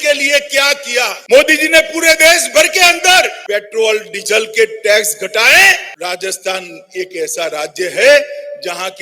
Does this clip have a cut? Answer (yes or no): yes